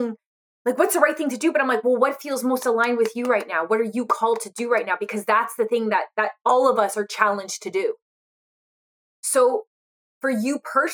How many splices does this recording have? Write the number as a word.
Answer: zero